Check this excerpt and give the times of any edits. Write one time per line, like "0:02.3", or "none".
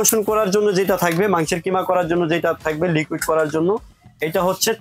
none